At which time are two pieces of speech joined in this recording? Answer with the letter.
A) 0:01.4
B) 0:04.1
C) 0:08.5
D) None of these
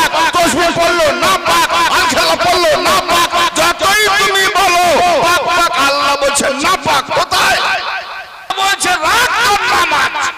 C